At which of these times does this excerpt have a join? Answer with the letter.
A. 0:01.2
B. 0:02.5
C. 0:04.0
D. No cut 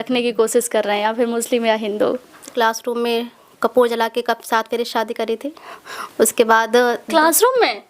B